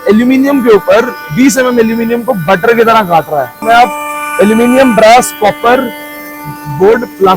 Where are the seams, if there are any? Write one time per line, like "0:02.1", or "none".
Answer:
0:03.6